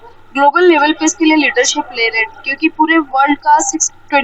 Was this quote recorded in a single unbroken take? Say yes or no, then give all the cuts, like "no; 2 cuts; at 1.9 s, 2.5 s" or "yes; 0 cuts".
yes; 0 cuts